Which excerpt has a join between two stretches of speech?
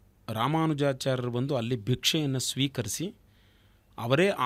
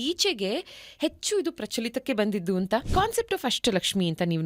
second; 1 cut; at 2.9 s

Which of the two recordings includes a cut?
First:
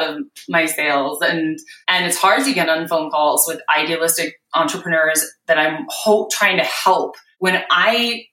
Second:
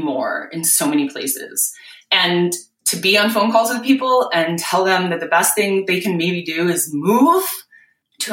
first; 2 cuts; at 1.7 s, 7.2 s

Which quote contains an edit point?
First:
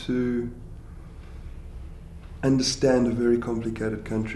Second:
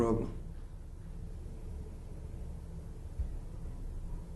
first; 1 cut; at 3.0 s

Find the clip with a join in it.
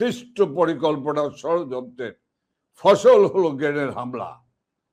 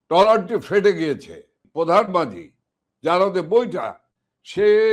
second; 1 cut; at 1.6 s

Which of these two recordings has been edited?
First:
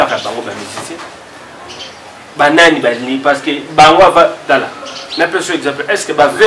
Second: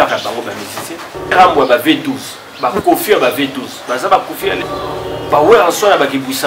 second; 2 cuts; at 1.3 s, 4.6 s

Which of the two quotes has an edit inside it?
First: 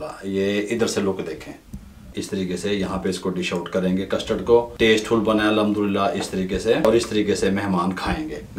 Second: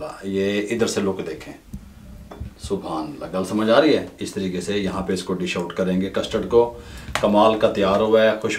first; 3 cuts; at 2.1 s, 4.7 s, 6.8 s

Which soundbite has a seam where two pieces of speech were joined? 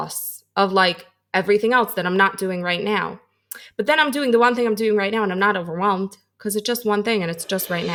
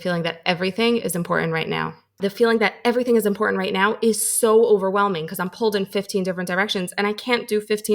second; 1 cut; at 2.2 s

